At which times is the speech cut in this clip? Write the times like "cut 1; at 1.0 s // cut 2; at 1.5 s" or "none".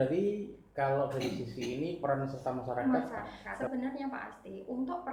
cut 1; at 3.7 s